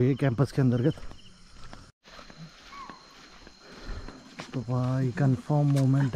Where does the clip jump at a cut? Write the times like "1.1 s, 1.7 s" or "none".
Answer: 2.0 s